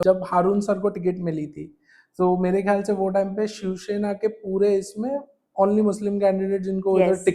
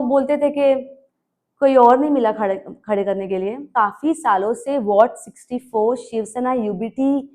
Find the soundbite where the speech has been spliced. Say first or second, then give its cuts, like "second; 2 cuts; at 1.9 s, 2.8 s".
second; 1 cut; at 3.7 s